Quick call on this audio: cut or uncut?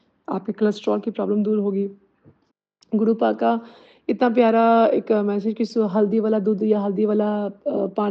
uncut